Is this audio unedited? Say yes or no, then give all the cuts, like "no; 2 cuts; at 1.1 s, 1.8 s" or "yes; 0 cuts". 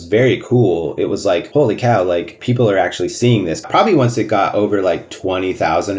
no; 4 cuts; at 1.5 s, 2.3 s, 3.6 s, 5.1 s